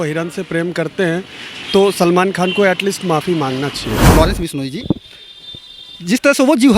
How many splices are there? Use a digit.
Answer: 1